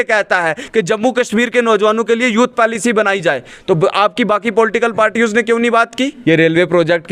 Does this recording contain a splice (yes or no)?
yes